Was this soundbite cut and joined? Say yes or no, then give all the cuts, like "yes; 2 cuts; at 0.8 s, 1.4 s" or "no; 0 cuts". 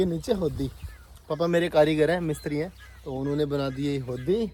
no; 0 cuts